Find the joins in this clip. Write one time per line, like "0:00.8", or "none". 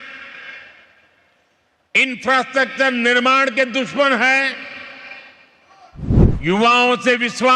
0:06.2